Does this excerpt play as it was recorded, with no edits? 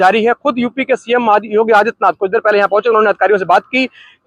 yes; 0 cuts

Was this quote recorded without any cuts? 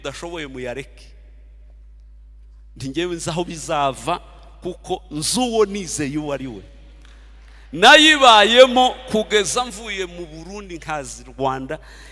yes; 0 cuts

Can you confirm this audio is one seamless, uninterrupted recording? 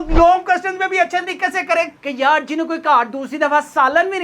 no; 1 cut; at 2.0 s

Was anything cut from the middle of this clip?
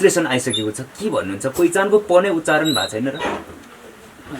no; 0 cuts

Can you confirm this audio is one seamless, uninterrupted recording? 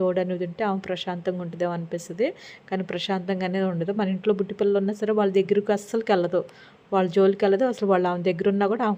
yes; 0 cuts

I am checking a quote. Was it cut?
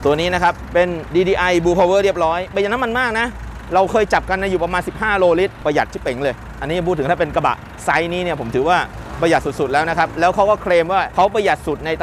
no; 0 cuts

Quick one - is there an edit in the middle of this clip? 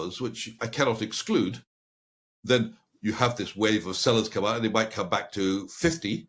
no; 0 cuts

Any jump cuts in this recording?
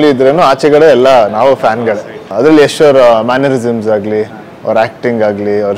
yes; 1 cut; at 2.3 s

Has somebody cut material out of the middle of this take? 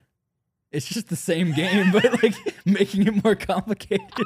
no; 0 cuts

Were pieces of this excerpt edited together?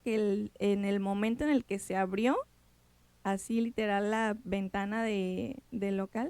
no; 0 cuts

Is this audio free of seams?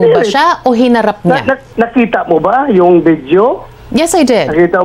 yes; 0 cuts

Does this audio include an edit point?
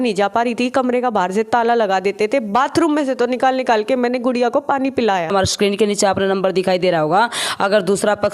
yes; 1 cut; at 5.3 s

